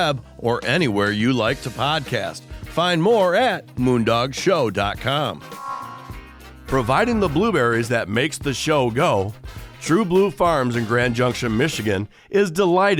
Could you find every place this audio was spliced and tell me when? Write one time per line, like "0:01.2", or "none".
none